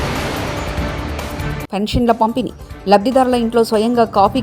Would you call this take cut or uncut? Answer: cut